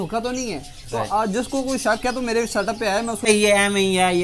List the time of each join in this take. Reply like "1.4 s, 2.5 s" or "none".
3.3 s